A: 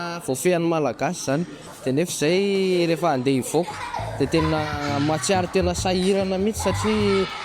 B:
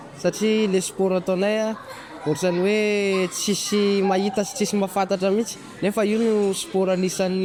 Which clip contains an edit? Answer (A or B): A